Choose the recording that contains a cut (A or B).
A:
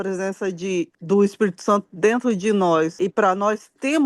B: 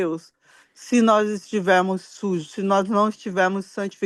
A